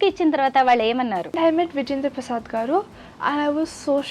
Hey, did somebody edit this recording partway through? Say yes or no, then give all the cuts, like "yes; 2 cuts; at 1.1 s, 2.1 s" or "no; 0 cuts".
yes; 1 cut; at 1.4 s